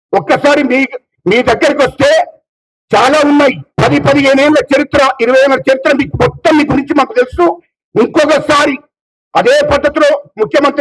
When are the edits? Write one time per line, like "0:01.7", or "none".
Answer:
none

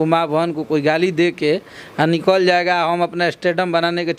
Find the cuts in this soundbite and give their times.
none

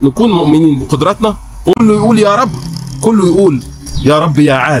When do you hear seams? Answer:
0:01.8

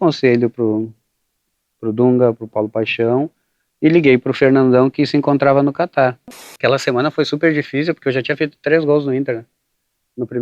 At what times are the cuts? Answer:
0:06.6

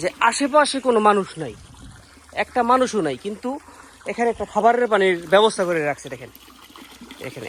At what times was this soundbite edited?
none

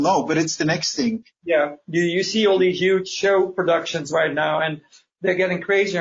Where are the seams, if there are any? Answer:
0:01.3

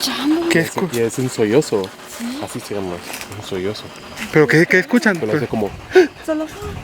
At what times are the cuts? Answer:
none

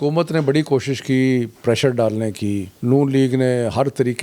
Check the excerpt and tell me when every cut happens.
0:02.7

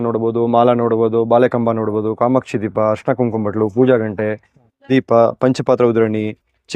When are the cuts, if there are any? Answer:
none

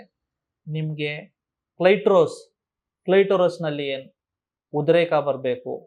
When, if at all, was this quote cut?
none

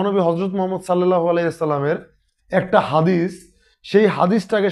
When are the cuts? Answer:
none

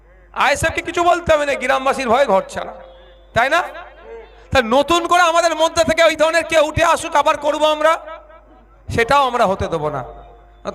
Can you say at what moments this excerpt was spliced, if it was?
none

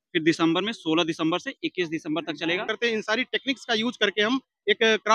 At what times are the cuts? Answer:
0:02.7

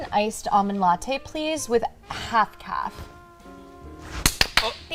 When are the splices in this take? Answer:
none

